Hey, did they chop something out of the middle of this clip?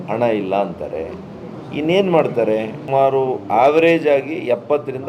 yes; 1 cut; at 2.8 s

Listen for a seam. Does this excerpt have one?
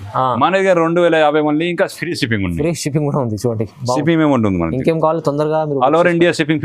no; 0 cuts

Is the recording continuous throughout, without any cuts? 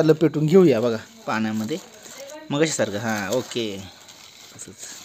yes; 0 cuts

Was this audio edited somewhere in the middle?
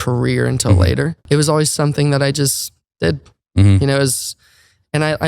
yes; 1 cut; at 1.2 s

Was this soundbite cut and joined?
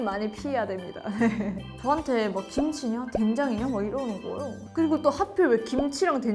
yes; 1 cut; at 1.7 s

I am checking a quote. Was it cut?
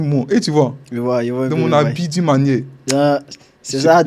no; 0 cuts

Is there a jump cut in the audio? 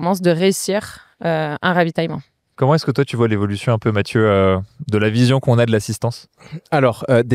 no; 0 cuts

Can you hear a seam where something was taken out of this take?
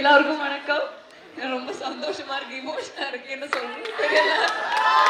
no; 0 cuts

